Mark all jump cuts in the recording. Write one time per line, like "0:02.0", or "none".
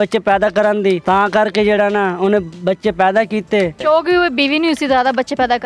0:01.0
0:03.8